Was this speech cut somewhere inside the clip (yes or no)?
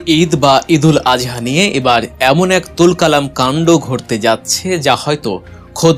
no